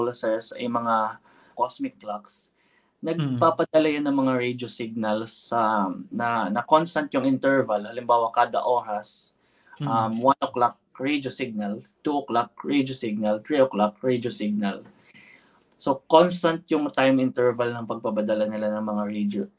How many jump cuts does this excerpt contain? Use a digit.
1